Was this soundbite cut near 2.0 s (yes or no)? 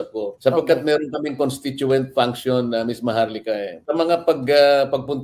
no